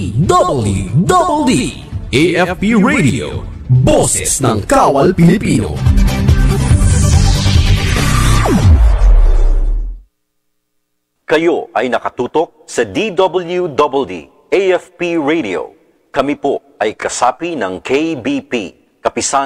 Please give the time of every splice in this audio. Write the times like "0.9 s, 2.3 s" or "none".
10.6 s